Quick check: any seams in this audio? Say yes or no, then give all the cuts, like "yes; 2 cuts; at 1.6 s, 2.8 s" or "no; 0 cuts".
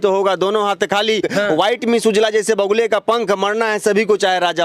yes; 1 cut; at 1.2 s